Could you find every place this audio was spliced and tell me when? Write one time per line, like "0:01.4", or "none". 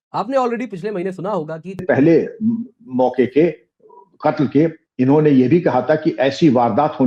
0:01.8